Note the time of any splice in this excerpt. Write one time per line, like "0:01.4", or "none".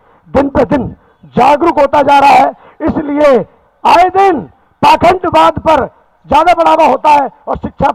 none